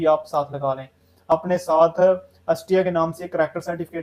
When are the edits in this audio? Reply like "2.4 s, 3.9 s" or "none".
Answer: 1.3 s